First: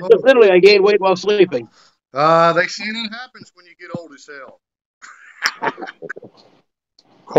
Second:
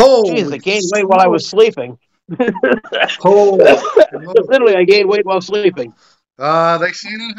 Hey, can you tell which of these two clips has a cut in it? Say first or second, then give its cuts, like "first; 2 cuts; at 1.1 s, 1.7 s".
first; 1 cut; at 6.2 s